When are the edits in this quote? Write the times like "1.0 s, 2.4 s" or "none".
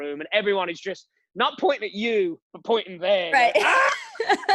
none